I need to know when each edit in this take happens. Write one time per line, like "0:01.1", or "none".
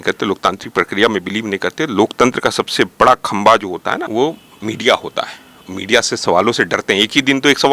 0:04.0